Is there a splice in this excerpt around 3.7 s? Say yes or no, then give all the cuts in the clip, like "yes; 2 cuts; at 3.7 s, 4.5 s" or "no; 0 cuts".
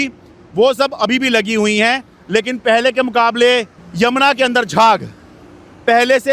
yes; 1 cut; at 3.7 s